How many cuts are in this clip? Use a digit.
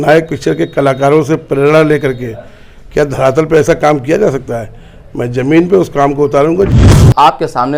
1